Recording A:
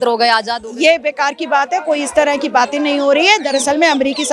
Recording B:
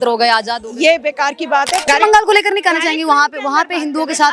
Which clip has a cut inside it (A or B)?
B